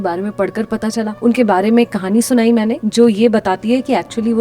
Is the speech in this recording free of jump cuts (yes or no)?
no